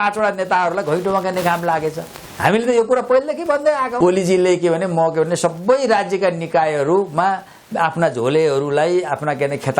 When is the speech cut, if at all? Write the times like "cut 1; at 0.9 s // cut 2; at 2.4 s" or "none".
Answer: cut 1; at 3.9 s